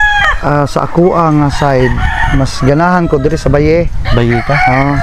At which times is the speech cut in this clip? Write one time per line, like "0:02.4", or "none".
none